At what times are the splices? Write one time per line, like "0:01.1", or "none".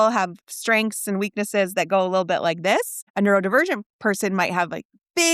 0:03.0